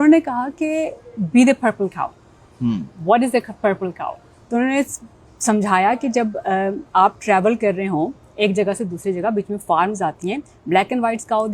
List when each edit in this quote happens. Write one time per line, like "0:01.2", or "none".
none